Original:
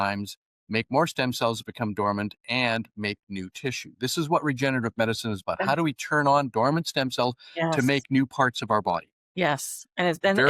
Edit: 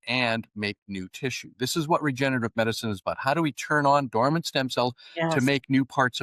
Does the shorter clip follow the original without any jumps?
yes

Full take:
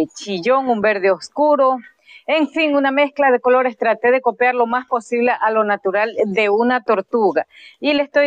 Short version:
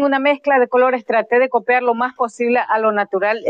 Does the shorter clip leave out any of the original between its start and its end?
no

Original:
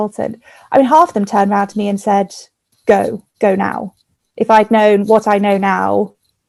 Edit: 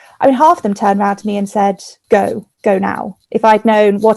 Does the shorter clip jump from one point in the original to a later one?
yes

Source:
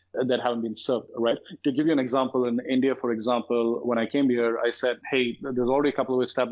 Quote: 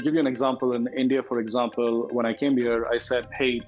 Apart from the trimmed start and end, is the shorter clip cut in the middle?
no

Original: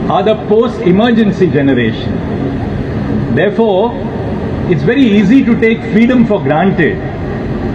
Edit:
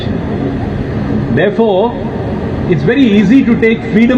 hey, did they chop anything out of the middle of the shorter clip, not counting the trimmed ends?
no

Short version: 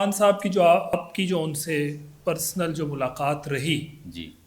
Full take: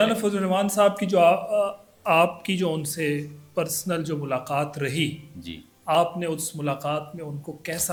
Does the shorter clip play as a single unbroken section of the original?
no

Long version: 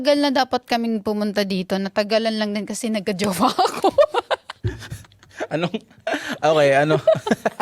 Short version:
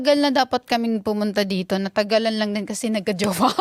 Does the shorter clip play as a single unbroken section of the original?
yes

